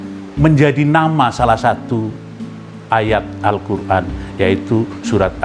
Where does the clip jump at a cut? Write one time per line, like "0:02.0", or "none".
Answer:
none